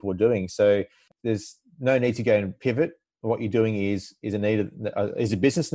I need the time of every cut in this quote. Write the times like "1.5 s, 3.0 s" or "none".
1.1 s